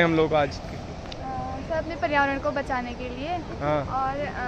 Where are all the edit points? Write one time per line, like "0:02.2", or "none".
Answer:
none